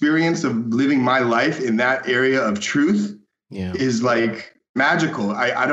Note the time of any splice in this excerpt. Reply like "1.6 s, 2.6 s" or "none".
4.8 s

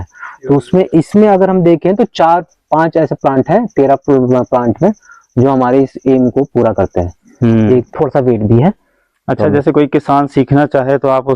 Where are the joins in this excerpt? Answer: 7.9 s

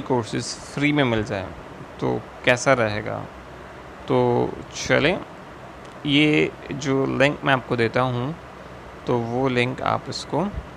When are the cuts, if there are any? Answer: none

